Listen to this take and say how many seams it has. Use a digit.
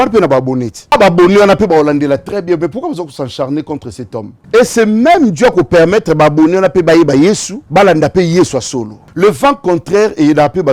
4